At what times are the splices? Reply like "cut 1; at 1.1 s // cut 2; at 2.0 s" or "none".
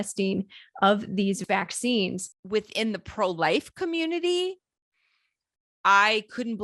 cut 1; at 1.4 s // cut 2; at 2.3 s